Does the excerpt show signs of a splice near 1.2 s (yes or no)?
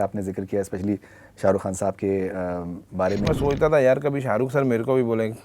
no